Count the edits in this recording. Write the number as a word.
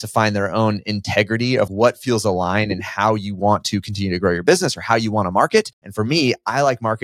two